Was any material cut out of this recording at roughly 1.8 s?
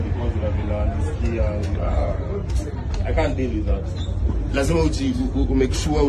yes; 1 cut; at 1.8 s

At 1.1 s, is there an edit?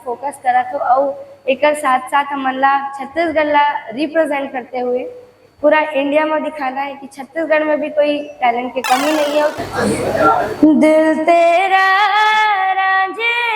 no; 1 cut; at 9.6 s

